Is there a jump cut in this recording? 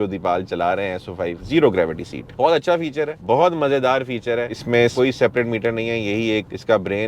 yes; 2 cuts; at 1.4 s, 4.5 s

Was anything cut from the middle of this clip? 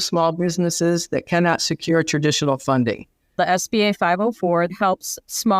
yes; 2 cuts; at 3.4 s, 4.7 s

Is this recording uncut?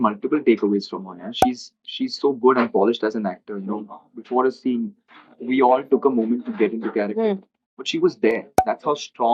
yes; 0 cuts

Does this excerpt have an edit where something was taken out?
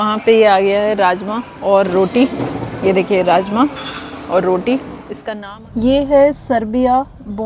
yes; 1 cut; at 5.0 s

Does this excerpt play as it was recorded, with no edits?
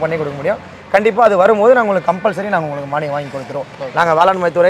yes; 0 cuts

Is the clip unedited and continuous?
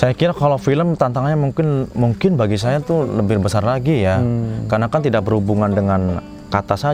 yes; 0 cuts

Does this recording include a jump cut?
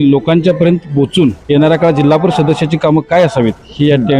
yes; 1 cut; at 1.4 s

